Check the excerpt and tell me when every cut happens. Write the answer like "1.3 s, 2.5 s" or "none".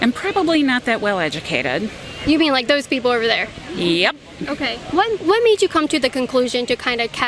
none